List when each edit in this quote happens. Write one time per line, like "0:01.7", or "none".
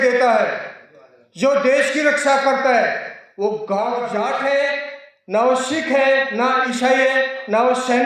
0:04.1